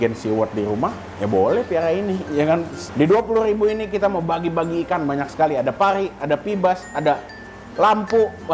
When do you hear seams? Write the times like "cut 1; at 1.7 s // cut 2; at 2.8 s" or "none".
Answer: cut 1; at 2.8 s